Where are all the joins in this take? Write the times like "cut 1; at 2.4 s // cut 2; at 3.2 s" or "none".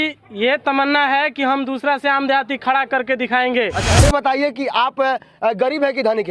cut 1; at 3.8 s